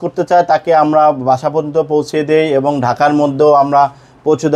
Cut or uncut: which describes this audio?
uncut